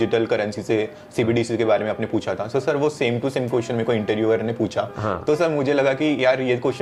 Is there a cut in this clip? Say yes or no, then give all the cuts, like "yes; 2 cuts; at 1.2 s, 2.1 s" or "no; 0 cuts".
no; 0 cuts